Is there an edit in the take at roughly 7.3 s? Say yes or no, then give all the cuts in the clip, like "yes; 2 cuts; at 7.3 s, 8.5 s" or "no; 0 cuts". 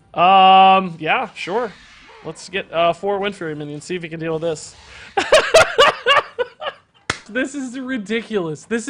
yes; 1 cut; at 7.3 s